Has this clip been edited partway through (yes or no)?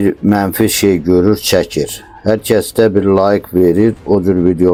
no